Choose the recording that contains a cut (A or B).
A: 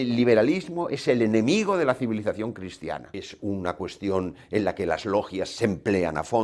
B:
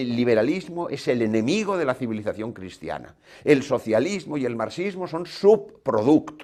A